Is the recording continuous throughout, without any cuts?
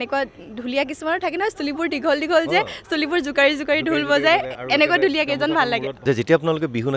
no; 1 cut; at 5.9 s

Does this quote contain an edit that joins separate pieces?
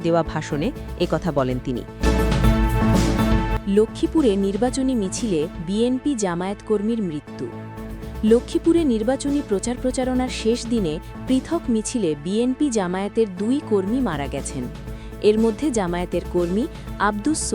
yes; 2 cuts; at 2.0 s, 3.6 s

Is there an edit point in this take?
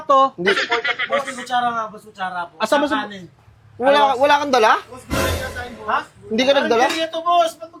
no; 0 cuts

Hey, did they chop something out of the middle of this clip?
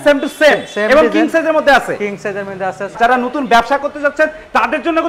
yes; 1 cut; at 3.0 s

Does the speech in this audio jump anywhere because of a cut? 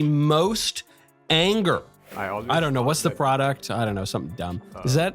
yes; 1 cut; at 2.1 s

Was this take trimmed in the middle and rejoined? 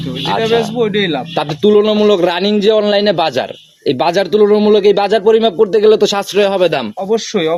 no; 0 cuts

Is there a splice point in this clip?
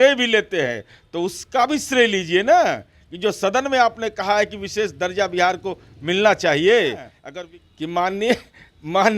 yes; 1 cut; at 7.2 s

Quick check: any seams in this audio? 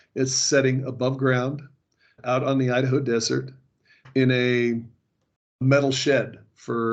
no; 0 cuts

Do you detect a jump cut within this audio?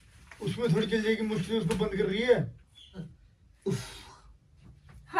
yes; 1 cut; at 3.0 s

